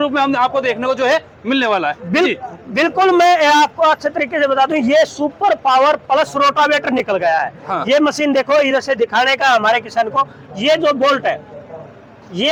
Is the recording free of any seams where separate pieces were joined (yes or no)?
yes